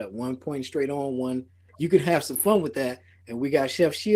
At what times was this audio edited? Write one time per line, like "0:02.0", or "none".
0:01.6